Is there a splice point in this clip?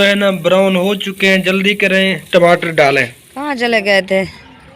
yes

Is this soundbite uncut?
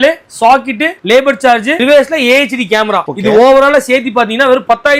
yes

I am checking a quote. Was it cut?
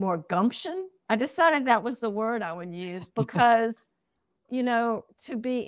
yes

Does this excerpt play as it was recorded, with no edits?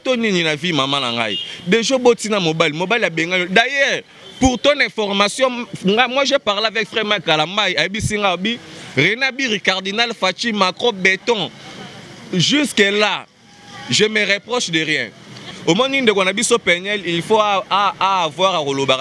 no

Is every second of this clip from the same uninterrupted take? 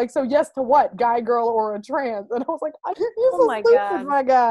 yes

